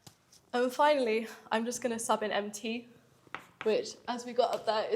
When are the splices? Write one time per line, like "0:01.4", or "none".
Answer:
none